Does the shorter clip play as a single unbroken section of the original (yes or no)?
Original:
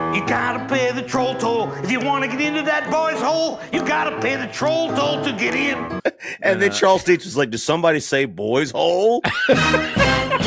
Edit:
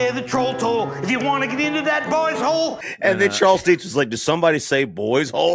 no